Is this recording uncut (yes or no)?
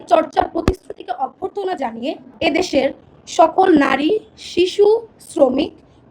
no